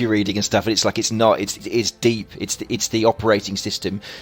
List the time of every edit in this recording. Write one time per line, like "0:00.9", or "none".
0:01.6

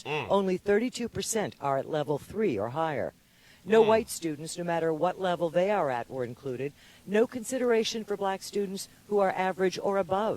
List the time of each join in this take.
0:06.9

